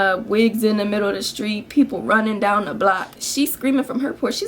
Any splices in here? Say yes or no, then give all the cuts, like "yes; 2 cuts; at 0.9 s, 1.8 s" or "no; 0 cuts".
yes; 1 cut; at 3.2 s